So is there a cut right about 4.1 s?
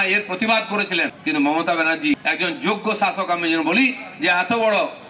no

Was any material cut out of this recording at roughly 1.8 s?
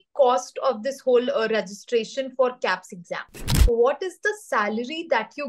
no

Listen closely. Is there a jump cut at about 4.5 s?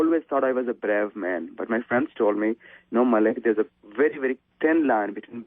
yes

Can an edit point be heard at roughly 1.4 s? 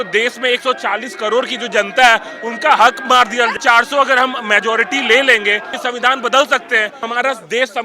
no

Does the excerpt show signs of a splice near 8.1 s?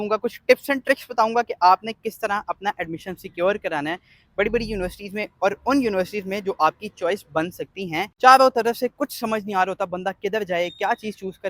yes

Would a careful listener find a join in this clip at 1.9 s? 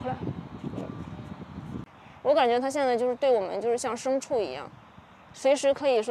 yes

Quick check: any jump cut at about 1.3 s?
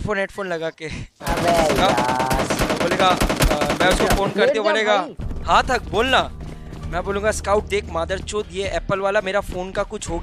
yes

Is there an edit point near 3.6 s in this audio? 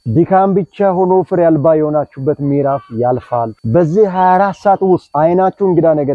no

